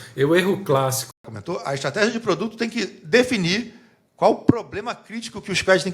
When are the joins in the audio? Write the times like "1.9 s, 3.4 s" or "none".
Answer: 1.2 s